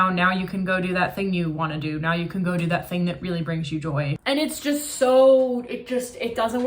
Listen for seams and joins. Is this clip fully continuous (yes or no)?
no